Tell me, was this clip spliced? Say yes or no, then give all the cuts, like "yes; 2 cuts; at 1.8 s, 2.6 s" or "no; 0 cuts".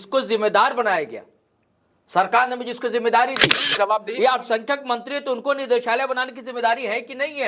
yes; 1 cut; at 3.7 s